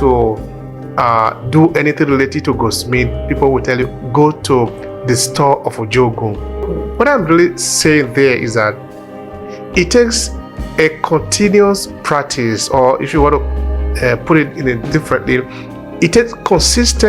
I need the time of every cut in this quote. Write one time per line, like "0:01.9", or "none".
0:06.7